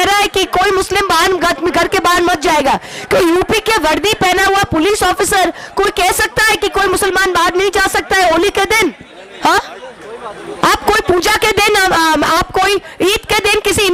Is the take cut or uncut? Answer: uncut